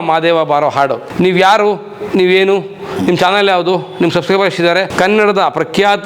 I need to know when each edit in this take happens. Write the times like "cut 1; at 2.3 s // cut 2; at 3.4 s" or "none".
cut 1; at 1.0 s // cut 2; at 4.9 s